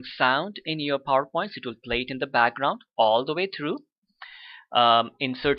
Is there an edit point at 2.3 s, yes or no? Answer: no